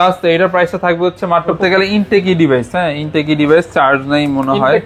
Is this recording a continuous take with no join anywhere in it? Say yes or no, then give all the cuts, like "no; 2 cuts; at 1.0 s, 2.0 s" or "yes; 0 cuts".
no; 1 cut; at 1.6 s